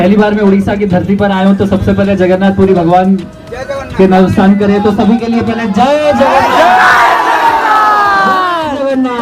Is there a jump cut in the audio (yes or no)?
no